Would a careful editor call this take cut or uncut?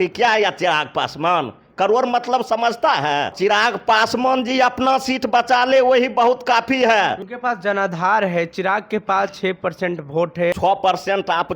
cut